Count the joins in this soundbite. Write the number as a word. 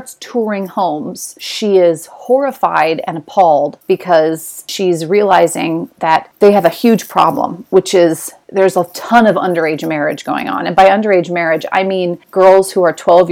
two